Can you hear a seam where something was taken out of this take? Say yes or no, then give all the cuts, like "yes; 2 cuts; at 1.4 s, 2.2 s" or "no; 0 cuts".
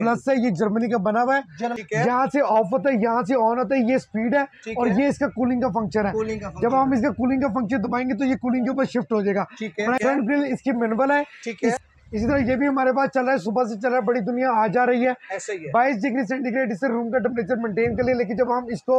yes; 3 cuts; at 1.7 s, 10.0 s, 11.8 s